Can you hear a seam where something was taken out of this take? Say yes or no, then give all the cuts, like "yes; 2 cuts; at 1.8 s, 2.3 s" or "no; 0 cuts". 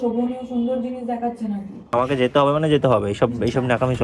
yes; 1 cut; at 1.8 s